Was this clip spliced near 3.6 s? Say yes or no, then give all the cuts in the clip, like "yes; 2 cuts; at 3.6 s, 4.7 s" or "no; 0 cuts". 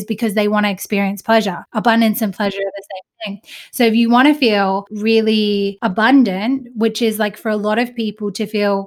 no; 3 cuts; at 1.7 s, 4.9 s, 5.8 s